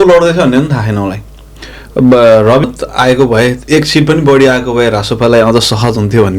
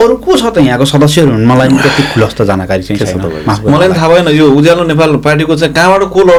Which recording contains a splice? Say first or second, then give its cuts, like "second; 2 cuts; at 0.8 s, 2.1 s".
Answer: first; 1 cut; at 2.6 s